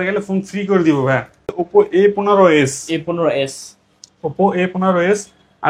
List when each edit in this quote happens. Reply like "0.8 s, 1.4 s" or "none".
1.6 s